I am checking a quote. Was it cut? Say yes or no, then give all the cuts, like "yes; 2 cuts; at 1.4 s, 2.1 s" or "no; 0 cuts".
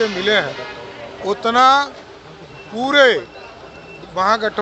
no; 0 cuts